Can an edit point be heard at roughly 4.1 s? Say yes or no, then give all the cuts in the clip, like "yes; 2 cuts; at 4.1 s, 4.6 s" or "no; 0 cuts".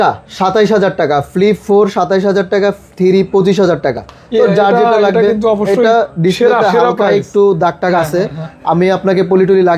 no; 0 cuts